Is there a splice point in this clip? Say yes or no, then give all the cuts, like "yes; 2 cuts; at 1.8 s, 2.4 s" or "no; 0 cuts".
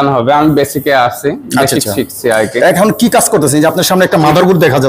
no; 0 cuts